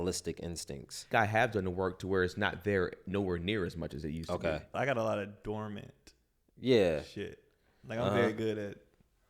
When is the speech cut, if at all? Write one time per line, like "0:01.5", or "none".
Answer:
0:01.1
0:04.8